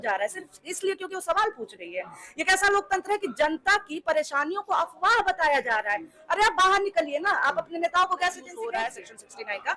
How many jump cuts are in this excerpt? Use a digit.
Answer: 1